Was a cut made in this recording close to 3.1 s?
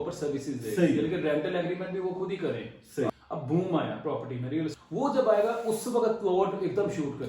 yes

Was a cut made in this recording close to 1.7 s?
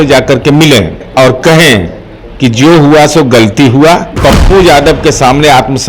no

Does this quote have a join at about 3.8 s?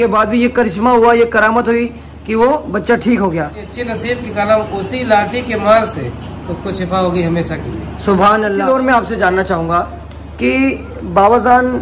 yes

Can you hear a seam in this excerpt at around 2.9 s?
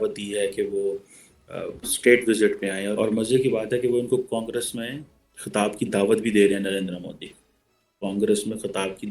yes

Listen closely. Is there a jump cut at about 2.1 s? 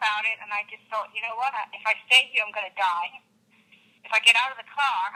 no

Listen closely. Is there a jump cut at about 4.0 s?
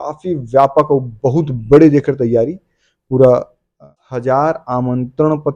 yes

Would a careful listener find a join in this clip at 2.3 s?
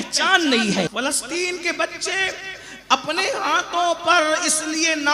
no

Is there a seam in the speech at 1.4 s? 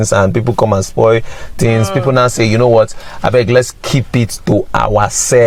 no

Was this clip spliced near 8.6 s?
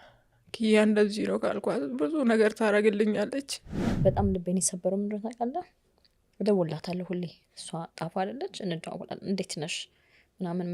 no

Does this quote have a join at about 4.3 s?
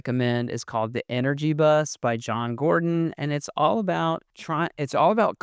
yes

